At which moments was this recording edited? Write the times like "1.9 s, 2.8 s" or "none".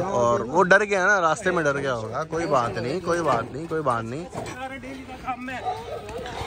4.5 s